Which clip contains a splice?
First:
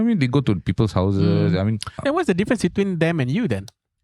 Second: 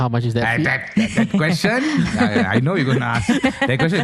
first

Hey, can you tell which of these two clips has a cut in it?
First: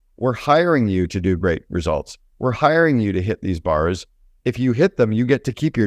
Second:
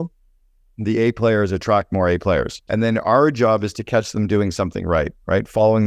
second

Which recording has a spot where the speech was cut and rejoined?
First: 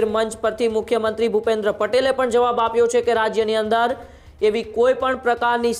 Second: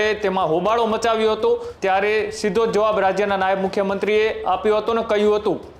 second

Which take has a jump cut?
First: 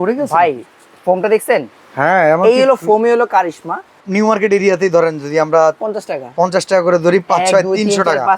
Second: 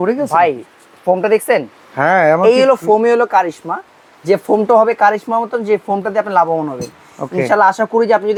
first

